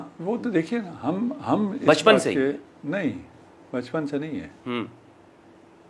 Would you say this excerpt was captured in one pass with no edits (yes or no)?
yes